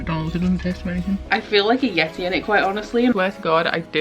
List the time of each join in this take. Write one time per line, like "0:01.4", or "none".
0:01.2
0:03.1